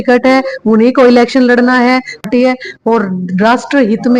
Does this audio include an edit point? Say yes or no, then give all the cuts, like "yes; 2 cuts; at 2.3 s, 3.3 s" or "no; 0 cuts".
yes; 1 cut; at 2.2 s